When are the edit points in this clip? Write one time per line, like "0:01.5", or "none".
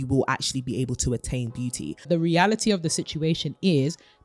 0:02.1